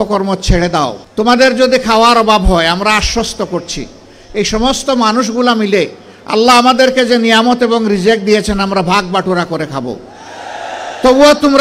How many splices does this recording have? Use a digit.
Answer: 1